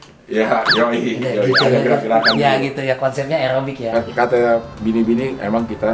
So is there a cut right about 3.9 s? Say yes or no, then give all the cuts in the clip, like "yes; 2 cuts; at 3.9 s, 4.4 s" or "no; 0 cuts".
yes; 1 cut; at 3.9 s